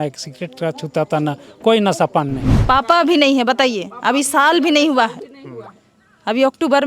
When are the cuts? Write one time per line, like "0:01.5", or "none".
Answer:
0:02.5